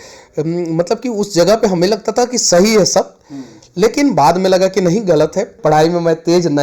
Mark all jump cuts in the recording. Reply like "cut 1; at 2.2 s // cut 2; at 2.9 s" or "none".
cut 1; at 5.6 s